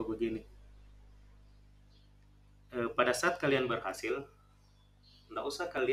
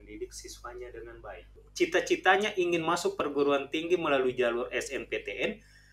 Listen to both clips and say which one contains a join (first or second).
second